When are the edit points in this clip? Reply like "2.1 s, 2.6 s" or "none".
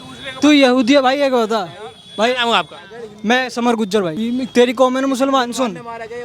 4.1 s